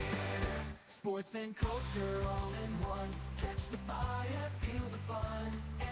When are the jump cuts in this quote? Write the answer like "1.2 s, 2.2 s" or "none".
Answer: none